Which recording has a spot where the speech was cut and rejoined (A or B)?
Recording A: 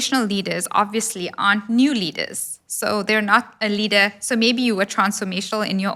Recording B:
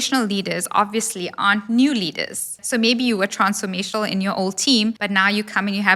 B